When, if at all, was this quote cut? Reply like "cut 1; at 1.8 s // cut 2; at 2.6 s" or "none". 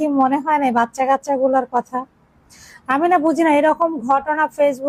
none